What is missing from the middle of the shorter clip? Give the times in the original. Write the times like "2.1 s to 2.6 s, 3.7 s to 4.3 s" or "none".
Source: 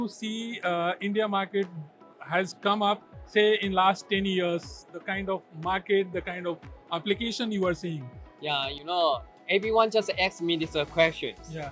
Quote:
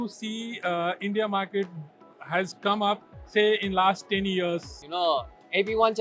4.8 s to 8.7 s